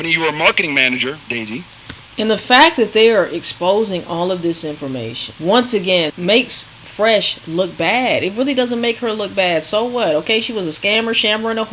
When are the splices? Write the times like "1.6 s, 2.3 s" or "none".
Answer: 5.2 s, 6.1 s